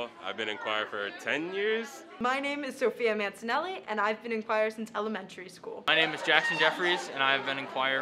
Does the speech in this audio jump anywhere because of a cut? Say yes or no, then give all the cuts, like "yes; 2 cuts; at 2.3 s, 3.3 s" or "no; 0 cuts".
yes; 2 cuts; at 2.0 s, 5.9 s